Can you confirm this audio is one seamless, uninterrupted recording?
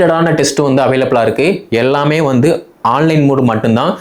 yes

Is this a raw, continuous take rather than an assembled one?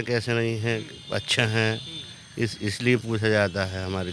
yes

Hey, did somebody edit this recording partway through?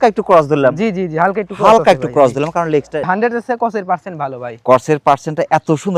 yes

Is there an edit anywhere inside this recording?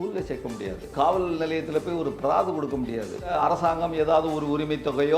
yes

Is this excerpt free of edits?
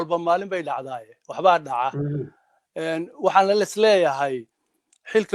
yes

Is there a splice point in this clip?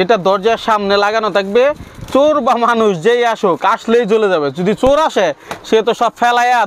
no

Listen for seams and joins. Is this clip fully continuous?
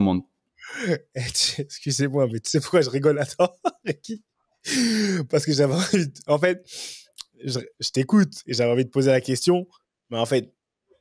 yes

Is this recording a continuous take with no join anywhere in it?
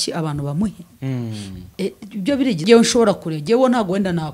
no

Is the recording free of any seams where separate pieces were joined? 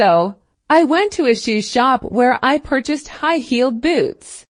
yes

